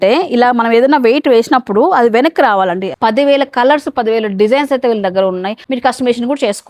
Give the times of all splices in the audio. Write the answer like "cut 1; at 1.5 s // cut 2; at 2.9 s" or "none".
cut 1; at 2.9 s // cut 2; at 5.6 s